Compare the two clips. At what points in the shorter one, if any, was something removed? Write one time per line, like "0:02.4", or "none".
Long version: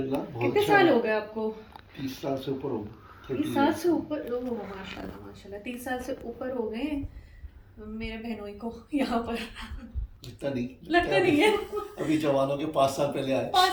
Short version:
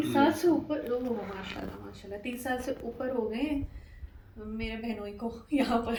none